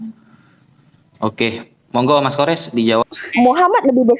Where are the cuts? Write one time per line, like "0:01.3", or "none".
0:03.0